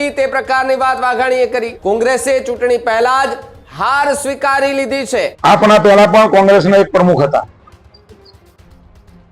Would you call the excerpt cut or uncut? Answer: cut